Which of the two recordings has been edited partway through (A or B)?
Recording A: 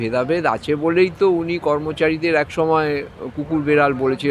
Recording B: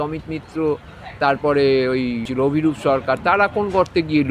B